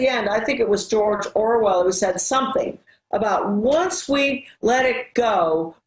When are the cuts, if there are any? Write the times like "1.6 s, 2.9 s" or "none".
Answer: 1.9 s